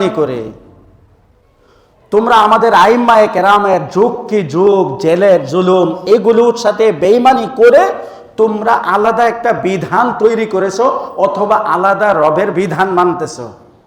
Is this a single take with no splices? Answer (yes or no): yes